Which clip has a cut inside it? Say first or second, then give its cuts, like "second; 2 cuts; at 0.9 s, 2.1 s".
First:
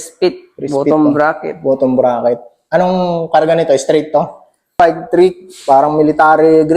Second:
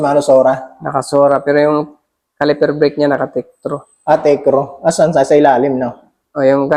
first; 1 cut; at 4.8 s